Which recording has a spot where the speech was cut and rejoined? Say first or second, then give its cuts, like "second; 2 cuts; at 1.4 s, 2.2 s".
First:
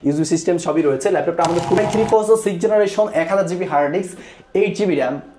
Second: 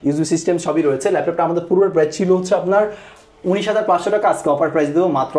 first; 1 cut; at 1.8 s